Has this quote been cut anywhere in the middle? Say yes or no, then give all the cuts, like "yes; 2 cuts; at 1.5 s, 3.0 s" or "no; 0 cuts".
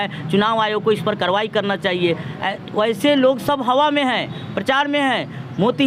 no; 0 cuts